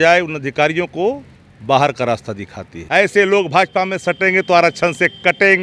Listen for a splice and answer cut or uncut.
cut